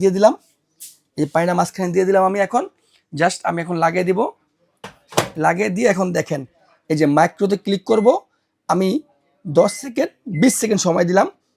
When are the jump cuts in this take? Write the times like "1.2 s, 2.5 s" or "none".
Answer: none